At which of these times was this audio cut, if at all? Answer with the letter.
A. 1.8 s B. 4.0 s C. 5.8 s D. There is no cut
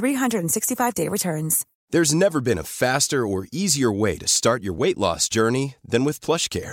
A